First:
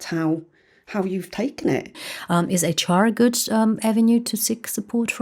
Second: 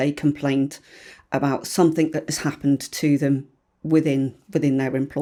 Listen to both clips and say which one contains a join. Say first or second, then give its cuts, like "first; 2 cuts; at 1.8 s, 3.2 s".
first; 1 cut; at 2.1 s